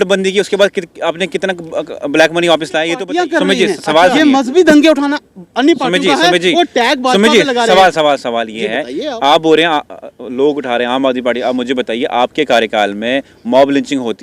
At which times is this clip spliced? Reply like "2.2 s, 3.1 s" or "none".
3.0 s